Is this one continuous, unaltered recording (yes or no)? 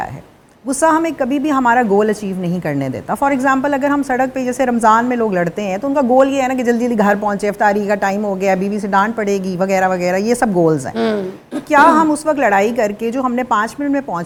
yes